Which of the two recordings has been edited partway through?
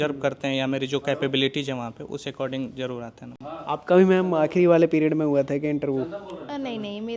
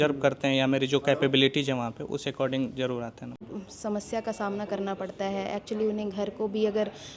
second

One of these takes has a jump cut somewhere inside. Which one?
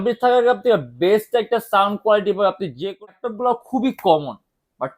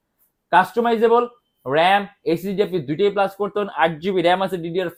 first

